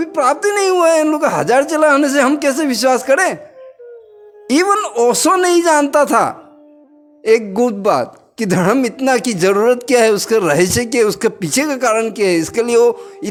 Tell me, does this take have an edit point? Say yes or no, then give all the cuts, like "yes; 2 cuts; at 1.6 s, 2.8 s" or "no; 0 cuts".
no; 0 cuts